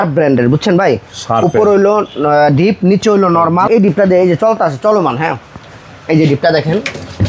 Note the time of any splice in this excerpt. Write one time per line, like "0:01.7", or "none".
0:03.7

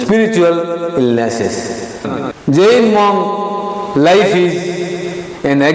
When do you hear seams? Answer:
0:02.1

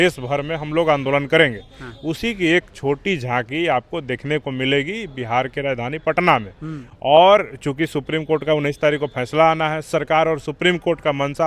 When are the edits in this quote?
none

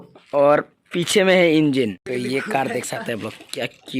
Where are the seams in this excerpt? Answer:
0:02.0

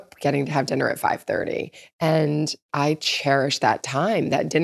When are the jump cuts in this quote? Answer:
0:02.7

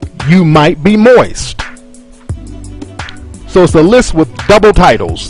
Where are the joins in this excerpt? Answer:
0:01.4

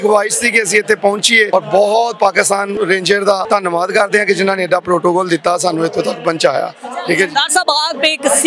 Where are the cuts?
0:01.5
0:02.7
0:03.4

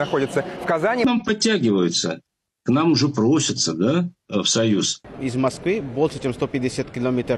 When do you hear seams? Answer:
0:01.0
0:05.1

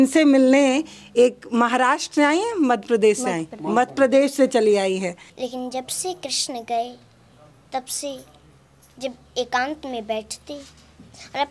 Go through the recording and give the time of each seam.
0:05.3

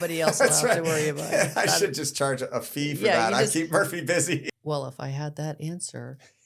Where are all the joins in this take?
0:04.5

